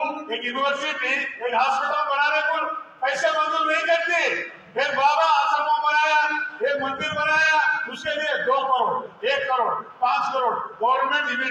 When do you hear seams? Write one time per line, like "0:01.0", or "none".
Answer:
none